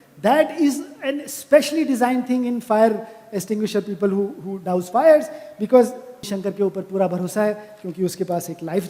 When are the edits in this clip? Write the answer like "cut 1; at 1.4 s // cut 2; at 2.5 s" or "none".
cut 1; at 6.4 s